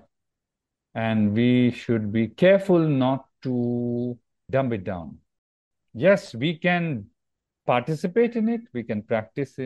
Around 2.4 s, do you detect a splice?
no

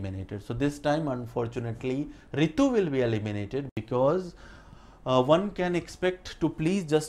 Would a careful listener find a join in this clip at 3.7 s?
yes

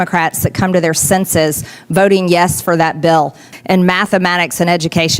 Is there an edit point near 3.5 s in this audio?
yes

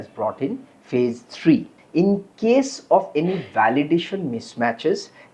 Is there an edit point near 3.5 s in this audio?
no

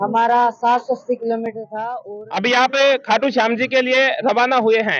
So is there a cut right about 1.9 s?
yes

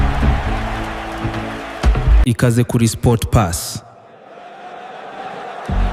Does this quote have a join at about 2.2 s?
yes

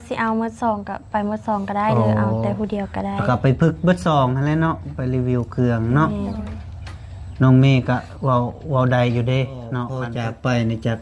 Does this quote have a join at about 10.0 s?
yes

